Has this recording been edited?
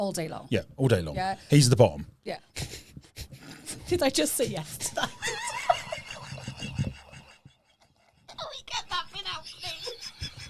no; 0 cuts

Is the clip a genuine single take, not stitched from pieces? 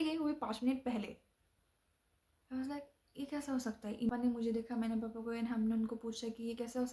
yes; 0 cuts

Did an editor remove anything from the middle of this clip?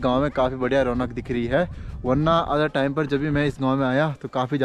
no; 0 cuts

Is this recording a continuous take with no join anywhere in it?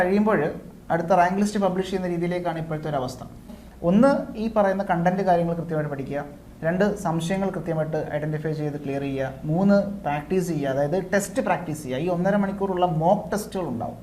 no; 1 cut; at 3.6 s

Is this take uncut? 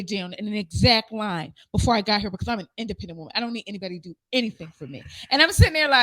yes; 0 cuts

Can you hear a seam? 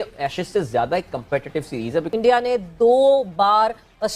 yes; 1 cut; at 2.1 s

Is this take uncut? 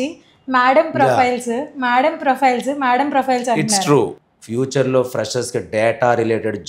no; 1 cut; at 4.2 s

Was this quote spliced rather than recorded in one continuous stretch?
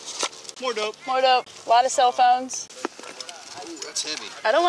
no; 0 cuts

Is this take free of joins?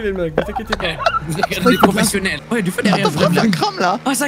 no; 1 cut; at 2.4 s

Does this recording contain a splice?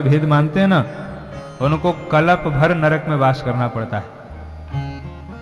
no; 0 cuts

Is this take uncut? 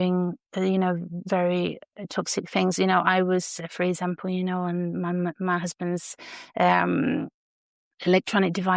yes; 0 cuts

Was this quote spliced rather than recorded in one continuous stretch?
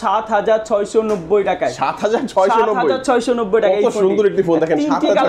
no; 0 cuts

